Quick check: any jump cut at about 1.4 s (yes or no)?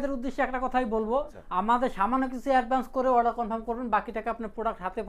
yes